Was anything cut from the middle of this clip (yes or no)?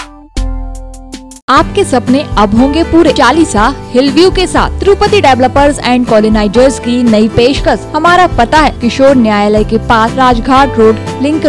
yes